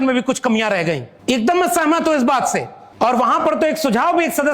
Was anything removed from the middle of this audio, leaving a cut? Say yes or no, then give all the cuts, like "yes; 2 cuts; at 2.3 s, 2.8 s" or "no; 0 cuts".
yes; 2 cuts; at 1.1 s, 2.8 s